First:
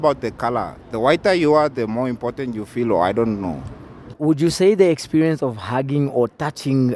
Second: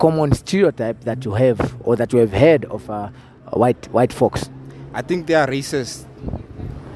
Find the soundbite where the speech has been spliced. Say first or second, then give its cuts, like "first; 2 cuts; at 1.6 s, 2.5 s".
first; 1 cut; at 4.2 s